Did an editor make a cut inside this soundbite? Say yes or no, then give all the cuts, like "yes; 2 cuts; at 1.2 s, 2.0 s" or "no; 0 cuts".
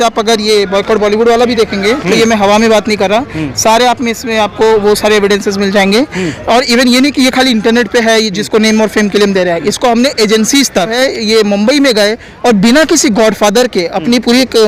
yes; 1 cut; at 10.9 s